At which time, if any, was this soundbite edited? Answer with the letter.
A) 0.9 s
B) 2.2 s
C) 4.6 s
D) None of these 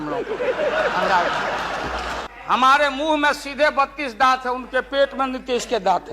B